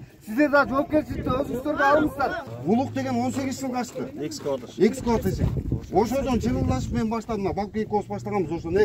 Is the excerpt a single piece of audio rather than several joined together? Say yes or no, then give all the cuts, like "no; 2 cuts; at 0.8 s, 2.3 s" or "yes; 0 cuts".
no; 1 cut; at 2.5 s